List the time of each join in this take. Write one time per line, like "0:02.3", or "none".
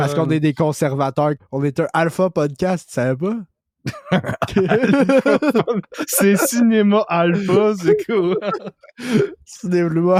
none